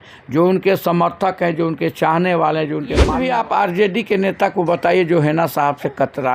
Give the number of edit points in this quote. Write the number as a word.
one